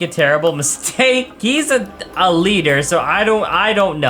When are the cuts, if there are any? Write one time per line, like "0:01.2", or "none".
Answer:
0:01.3